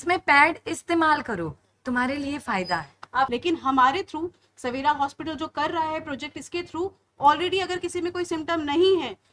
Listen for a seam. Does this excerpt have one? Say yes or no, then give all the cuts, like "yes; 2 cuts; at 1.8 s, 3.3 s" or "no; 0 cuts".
yes; 1 cut; at 3.3 s